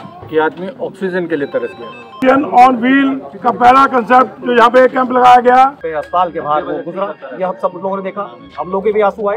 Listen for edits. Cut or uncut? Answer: cut